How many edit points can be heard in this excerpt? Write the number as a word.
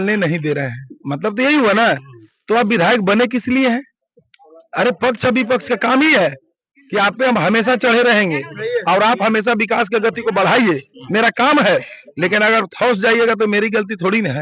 zero